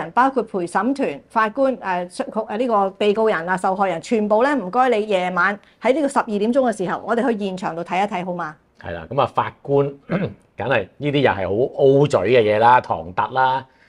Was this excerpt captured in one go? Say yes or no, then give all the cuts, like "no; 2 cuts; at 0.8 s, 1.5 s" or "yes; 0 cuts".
yes; 0 cuts